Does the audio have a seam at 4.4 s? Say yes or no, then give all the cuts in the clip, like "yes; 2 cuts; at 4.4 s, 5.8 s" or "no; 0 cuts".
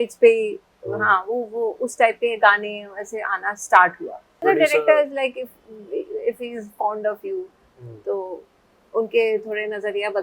yes; 1 cut; at 4.4 s